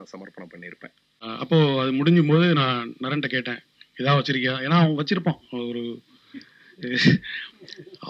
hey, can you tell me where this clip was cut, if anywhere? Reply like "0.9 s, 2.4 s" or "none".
1.2 s